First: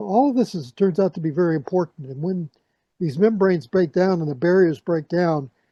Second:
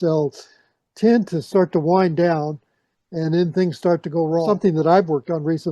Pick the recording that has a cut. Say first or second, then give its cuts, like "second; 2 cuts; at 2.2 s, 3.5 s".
second; 1 cut; at 4.5 s